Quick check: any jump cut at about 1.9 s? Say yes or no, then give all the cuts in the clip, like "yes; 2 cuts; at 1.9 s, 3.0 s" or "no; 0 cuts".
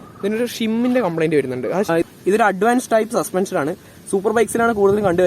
yes; 1 cut; at 1.9 s